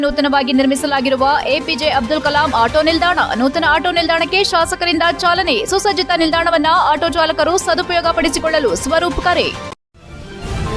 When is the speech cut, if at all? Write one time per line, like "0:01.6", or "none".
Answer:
0:09.7